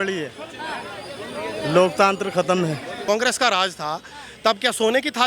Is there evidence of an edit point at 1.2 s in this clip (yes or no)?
no